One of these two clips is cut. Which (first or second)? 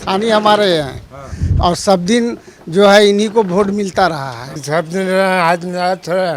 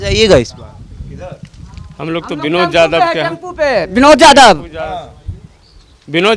first